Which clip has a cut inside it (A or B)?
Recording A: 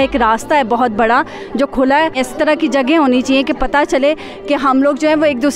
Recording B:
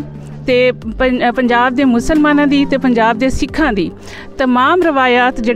A